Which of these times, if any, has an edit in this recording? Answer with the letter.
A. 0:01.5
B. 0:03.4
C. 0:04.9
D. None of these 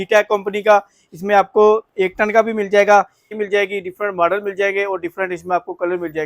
B